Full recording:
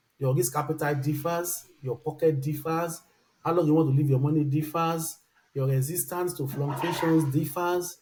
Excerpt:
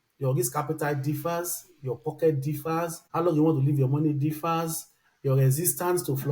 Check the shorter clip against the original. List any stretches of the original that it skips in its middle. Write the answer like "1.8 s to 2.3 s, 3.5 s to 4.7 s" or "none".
3.0 s to 3.3 s